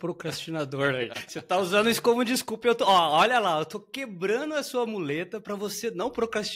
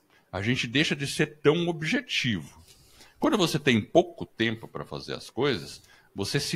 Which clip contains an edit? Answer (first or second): first